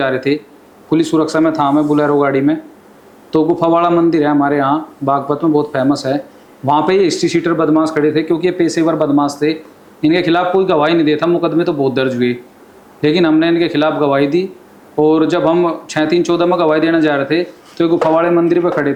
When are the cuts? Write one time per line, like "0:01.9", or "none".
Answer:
none